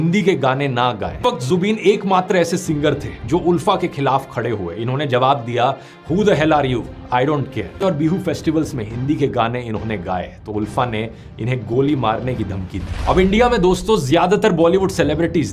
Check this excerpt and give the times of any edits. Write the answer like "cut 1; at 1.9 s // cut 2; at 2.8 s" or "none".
cut 1; at 1.2 s